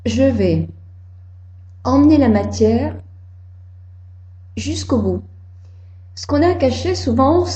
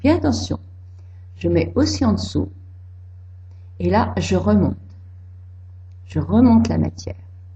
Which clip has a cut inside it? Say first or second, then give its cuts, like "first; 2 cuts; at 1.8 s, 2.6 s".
first; 1 cut; at 3.4 s